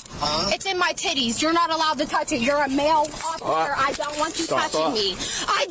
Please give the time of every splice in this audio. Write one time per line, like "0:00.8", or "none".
none